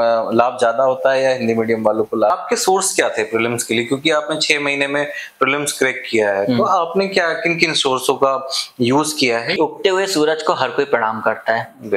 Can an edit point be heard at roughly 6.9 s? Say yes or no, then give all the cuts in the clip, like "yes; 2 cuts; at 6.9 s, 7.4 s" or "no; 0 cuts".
no; 2 cuts; at 2.3 s, 9.6 s